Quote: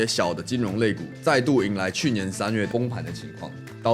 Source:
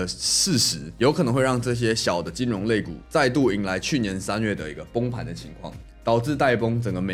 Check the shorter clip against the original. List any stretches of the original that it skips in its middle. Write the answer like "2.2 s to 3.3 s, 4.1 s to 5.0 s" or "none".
4.6 s to 4.9 s